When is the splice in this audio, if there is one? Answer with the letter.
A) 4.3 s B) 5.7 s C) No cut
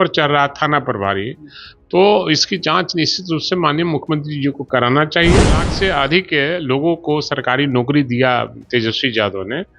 B